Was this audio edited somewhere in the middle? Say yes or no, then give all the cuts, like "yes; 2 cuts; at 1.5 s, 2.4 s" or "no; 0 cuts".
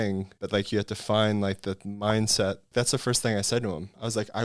yes; 1 cut; at 2.7 s